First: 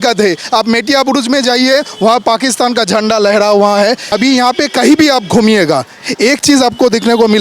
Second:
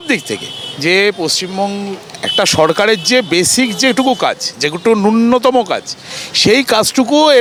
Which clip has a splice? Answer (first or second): first